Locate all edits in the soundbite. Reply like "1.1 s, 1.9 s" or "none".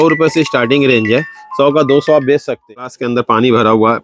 3.0 s

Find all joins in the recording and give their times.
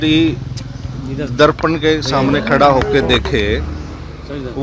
none

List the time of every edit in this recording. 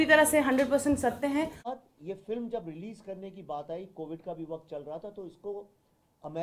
1.7 s

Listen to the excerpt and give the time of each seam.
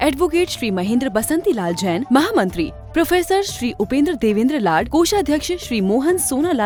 none

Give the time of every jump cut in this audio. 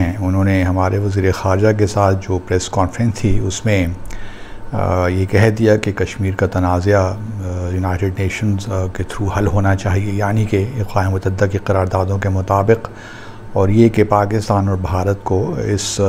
none

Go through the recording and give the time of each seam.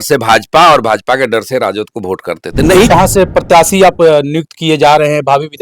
2.9 s

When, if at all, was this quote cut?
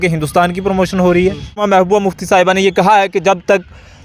1.6 s

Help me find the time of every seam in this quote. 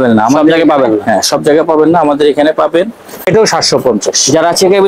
3.3 s

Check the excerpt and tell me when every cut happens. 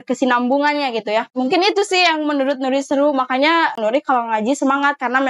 1.3 s, 3.8 s

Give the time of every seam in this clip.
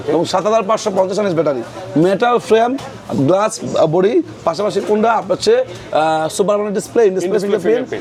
none

